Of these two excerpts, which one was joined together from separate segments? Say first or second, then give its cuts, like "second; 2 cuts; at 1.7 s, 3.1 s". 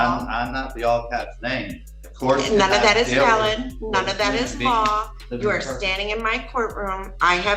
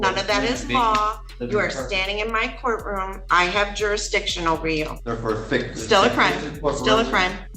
second; 1 cut; at 5.0 s